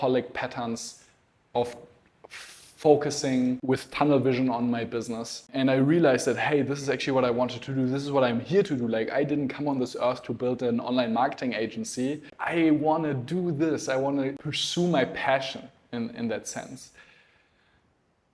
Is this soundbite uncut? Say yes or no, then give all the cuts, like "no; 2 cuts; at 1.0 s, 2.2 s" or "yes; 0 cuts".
no; 4 cuts; at 3.6 s, 5.5 s, 12.4 s, 14.5 s